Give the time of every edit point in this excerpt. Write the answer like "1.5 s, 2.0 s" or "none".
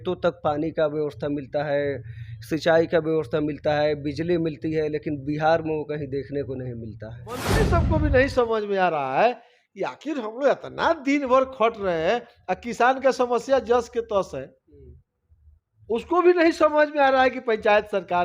7.6 s